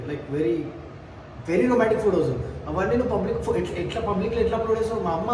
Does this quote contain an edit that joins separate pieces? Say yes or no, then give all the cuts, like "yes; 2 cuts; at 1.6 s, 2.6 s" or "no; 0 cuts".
no; 0 cuts